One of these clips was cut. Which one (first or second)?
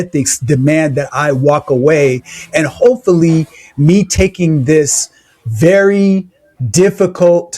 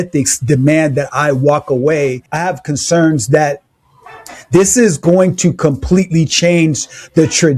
second